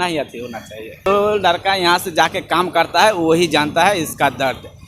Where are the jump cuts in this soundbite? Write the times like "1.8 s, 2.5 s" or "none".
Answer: 1.1 s